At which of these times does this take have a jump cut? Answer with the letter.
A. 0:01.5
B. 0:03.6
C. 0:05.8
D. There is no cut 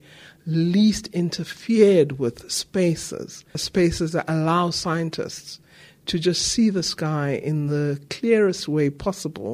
B